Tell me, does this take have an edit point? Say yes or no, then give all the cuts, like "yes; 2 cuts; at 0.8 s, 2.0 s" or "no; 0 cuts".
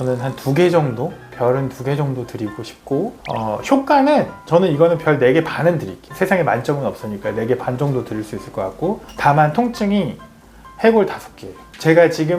yes; 1 cut; at 3.2 s